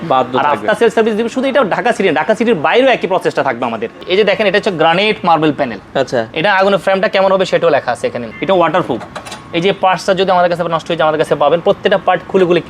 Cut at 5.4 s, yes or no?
no